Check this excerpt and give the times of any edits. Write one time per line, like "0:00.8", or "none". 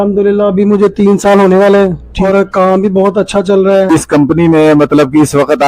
0:02.1
0:03.9